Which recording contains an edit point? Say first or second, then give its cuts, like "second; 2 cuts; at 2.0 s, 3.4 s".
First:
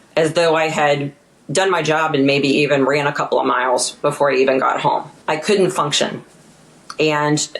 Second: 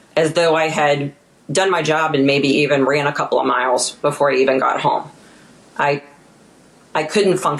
first; 1 cut; at 5.1 s